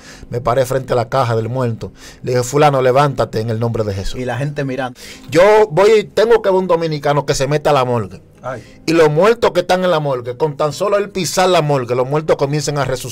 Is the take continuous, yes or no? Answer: no